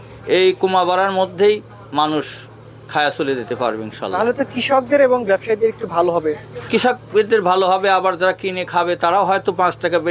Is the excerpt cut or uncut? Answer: uncut